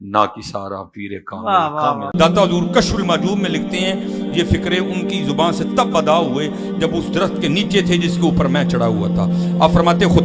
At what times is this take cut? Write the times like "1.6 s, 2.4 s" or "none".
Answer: 2.0 s